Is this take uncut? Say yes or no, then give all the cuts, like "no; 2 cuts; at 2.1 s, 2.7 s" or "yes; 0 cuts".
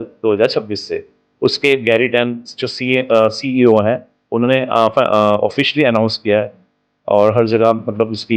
yes; 0 cuts